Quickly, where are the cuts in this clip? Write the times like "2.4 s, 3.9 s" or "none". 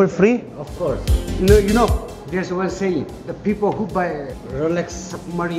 1.4 s